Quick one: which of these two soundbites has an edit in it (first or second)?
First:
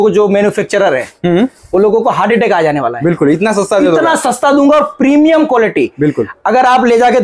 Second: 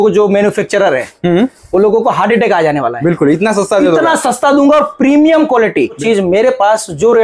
second